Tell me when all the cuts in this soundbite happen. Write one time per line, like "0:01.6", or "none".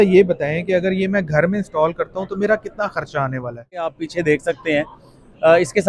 0:04.0